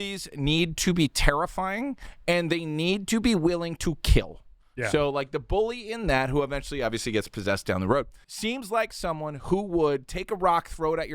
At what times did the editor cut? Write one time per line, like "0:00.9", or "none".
0:08.5